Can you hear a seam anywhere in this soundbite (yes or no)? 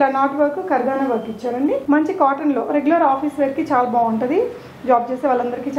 yes